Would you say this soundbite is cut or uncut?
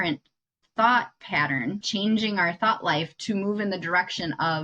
cut